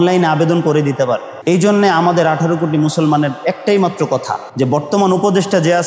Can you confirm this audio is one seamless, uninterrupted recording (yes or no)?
no